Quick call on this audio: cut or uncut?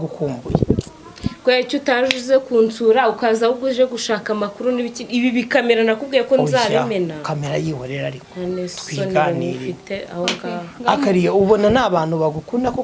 uncut